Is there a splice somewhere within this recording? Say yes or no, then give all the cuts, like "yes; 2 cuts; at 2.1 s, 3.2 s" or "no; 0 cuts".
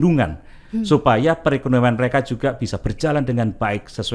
no; 0 cuts